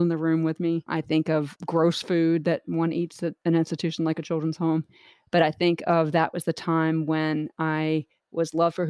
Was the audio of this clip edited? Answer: no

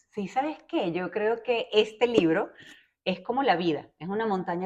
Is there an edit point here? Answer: no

